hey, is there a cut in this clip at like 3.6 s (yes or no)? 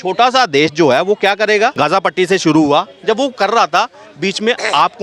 no